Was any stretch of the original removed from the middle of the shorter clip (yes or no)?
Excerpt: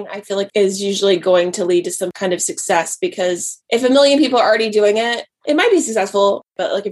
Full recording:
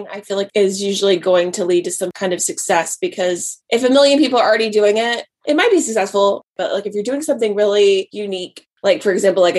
no